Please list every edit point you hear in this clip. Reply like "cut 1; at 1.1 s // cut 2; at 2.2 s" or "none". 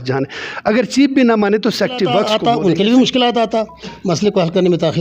cut 1; at 2.2 s